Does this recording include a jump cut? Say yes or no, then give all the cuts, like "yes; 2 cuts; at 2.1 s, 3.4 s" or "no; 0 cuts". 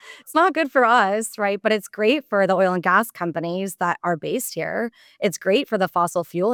no; 0 cuts